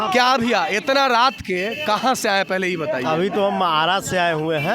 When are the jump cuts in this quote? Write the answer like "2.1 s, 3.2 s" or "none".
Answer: none